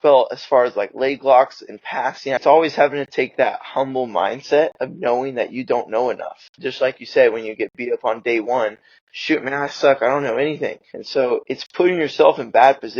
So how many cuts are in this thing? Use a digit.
3